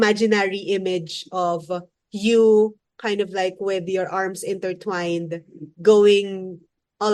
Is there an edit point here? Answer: no; 0 cuts

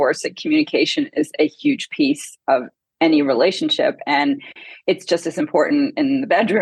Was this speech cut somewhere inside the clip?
no; 0 cuts

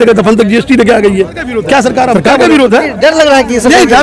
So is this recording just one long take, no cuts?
no; 1 cut; at 2.2 s

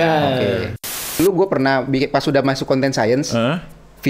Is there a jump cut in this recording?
yes; 1 cut; at 1.2 s

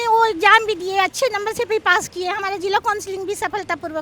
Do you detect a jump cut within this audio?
no; 0 cuts

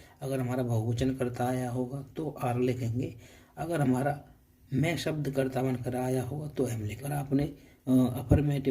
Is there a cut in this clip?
yes; 1 cut; at 6.9 s

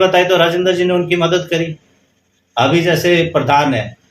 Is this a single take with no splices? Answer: yes; 0 cuts

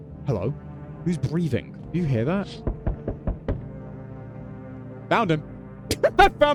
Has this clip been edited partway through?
no; 0 cuts

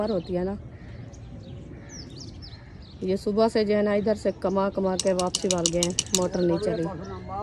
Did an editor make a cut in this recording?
no; 0 cuts

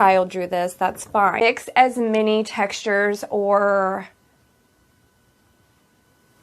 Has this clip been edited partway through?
yes; 1 cut; at 1.4 s

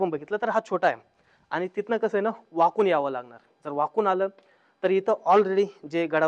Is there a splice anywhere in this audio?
no; 0 cuts

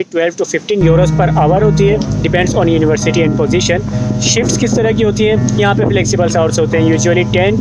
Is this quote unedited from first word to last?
yes; 0 cuts

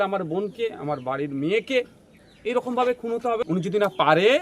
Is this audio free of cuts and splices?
no; 1 cut; at 3.5 s

